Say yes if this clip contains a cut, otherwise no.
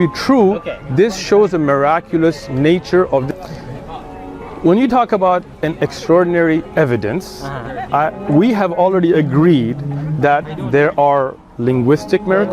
yes